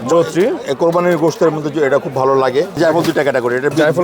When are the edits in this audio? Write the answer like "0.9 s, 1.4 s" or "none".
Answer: 2.8 s